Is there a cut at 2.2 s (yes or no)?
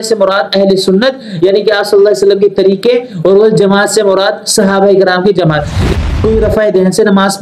no